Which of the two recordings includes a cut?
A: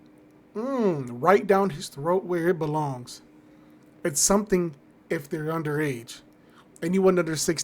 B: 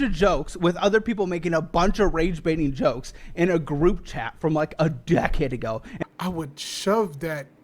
B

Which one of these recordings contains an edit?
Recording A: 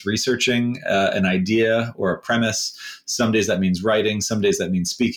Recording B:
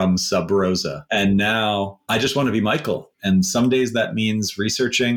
B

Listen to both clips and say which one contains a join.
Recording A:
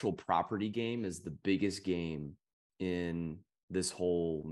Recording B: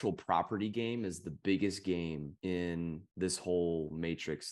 B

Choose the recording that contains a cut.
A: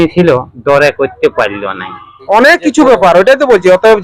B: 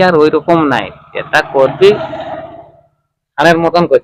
A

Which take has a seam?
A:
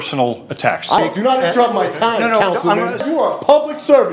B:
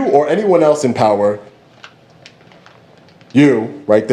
A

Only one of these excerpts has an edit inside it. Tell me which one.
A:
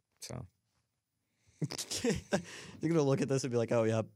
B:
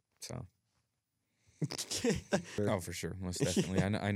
B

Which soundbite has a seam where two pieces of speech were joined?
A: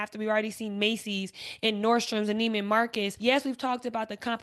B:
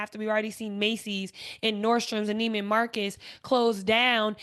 A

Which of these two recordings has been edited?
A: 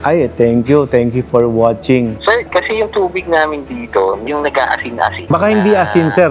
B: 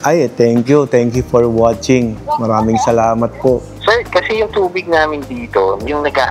A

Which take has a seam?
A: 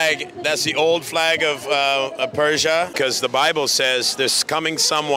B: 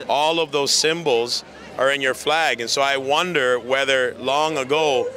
A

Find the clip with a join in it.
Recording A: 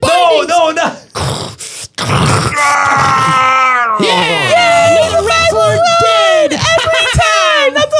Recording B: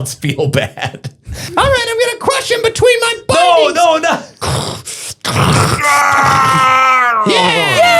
B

